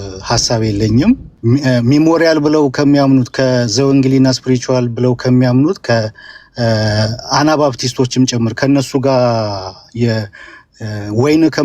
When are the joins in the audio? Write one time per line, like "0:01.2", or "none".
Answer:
0:01.3